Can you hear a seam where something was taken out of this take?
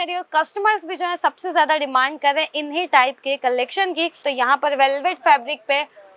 yes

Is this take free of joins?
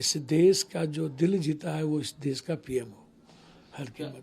yes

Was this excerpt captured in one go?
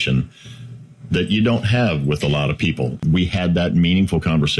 no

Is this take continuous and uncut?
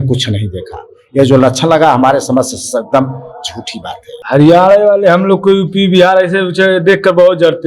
no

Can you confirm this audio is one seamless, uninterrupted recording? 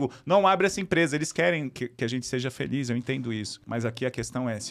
no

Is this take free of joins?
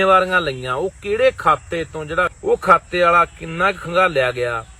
no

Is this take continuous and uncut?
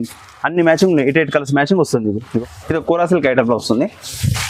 no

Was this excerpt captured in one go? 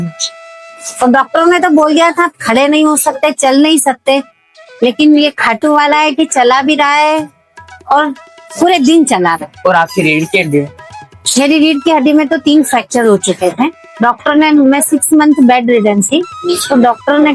yes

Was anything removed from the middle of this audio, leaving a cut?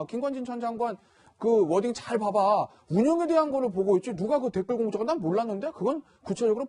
no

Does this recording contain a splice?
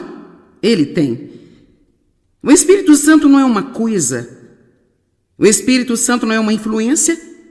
no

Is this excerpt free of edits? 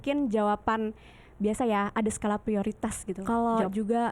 no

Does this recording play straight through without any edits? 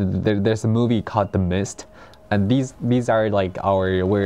yes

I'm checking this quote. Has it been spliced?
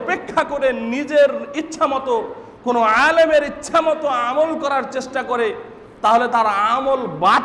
no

